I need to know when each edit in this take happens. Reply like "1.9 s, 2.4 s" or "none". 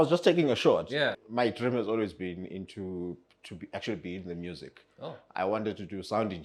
1.1 s